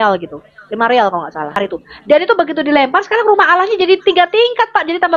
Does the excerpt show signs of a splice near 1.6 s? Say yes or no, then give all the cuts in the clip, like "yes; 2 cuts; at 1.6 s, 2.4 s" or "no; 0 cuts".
yes; 1 cut; at 1.6 s